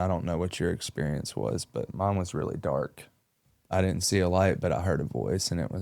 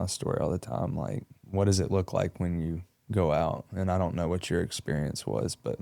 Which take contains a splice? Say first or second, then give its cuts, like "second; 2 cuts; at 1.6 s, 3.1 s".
second; 1 cut; at 1.4 s